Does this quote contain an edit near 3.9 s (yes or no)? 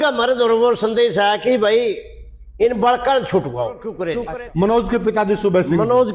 no